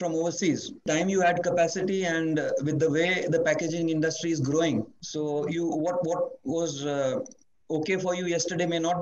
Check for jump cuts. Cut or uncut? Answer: cut